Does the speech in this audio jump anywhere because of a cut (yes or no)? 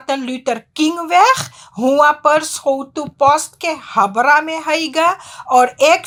no